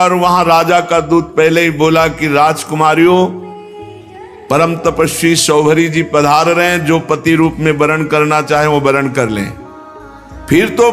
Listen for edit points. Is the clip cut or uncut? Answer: uncut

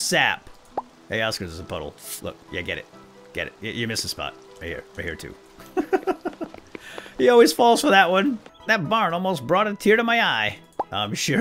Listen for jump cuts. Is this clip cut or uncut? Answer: cut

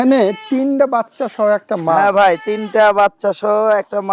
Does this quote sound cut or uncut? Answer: uncut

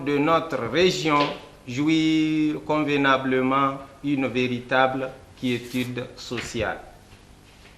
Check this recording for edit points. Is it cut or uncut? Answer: uncut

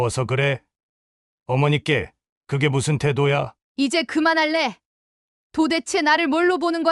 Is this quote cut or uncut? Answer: cut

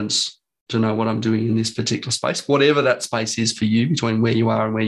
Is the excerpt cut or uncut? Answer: uncut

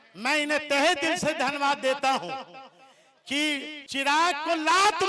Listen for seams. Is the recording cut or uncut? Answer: cut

